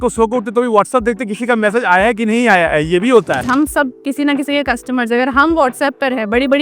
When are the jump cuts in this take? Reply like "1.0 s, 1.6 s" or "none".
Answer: 3.4 s